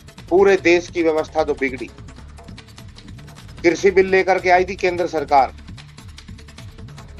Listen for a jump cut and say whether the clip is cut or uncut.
uncut